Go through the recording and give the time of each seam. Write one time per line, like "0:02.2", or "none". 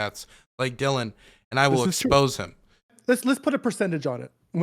0:02.9